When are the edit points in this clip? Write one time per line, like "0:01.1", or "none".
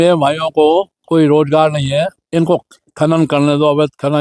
0:01.0
0:02.2